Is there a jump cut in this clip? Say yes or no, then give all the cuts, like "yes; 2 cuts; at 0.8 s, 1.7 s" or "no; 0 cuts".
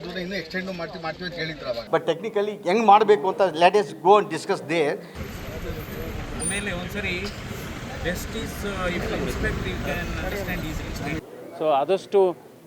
yes; 3 cuts; at 1.8 s, 5.2 s, 11.3 s